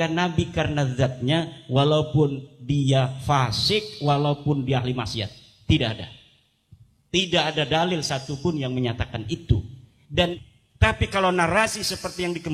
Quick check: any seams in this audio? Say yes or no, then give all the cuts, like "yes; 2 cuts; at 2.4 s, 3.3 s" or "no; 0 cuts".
yes; 1 cut; at 10.4 s